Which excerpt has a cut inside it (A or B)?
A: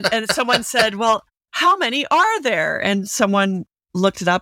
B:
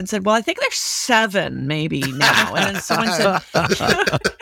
A